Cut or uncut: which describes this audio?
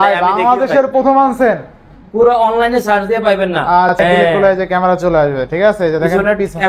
cut